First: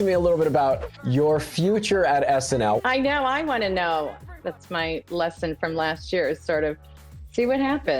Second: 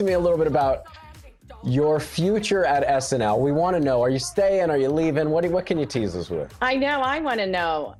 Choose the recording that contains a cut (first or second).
first